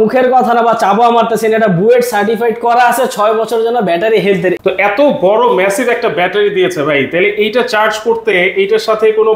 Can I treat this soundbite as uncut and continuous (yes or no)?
yes